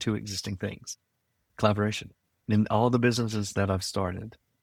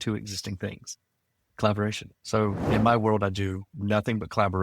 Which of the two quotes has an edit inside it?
second; 1 cut; at 2.1 s

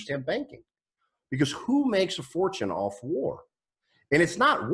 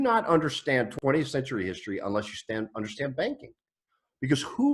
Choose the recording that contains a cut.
second; 1 cut; at 0.9 s

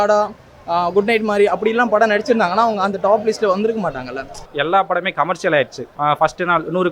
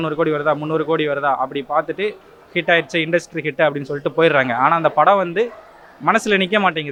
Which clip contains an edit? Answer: first; 2 cuts; at 4.4 s, 5.8 s

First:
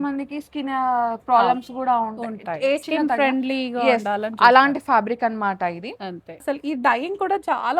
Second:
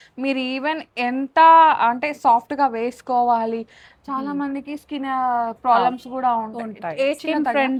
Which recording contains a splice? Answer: first; 1 cut; at 6.4 s

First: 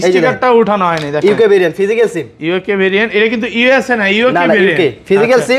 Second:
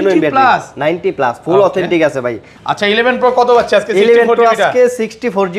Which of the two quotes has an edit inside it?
second; 1 cut; at 2.5 s

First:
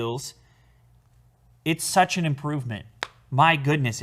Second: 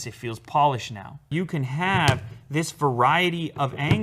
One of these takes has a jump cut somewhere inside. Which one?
second; 1 cut; at 1.3 s

